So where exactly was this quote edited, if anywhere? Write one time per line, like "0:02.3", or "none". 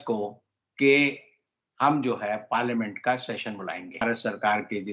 0:04.0